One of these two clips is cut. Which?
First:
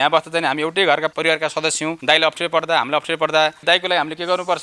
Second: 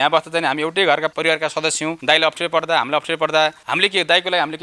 first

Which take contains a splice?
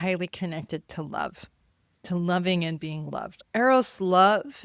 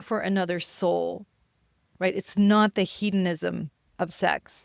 first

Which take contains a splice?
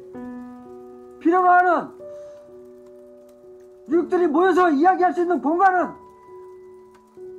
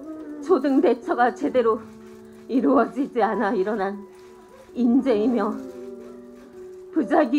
first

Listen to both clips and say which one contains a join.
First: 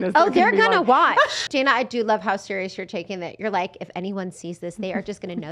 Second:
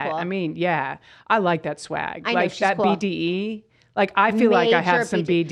first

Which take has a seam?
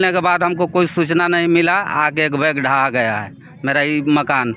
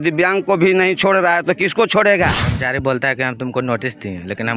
second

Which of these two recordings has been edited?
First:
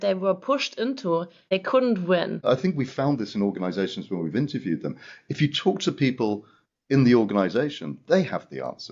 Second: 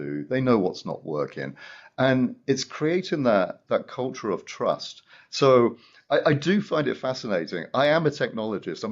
first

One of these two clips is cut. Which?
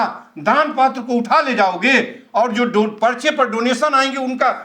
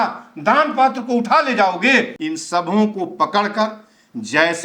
second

